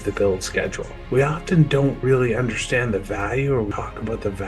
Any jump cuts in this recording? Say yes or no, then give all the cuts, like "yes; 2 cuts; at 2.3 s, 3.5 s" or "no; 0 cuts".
yes; 3 cuts; at 1.0 s, 2.0 s, 3.7 s